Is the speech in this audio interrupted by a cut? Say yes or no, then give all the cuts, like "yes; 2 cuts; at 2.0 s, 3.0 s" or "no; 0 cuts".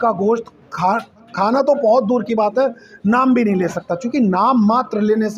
no; 0 cuts